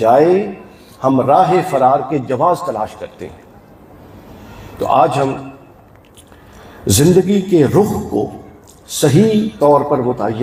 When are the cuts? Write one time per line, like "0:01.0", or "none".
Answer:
none